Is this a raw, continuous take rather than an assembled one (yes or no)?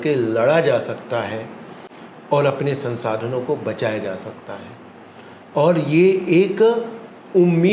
yes